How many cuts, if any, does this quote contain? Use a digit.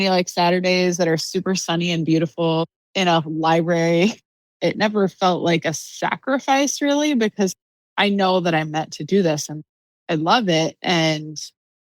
2